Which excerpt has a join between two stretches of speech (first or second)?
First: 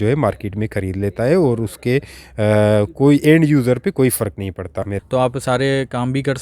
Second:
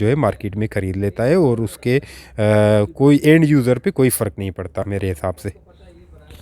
first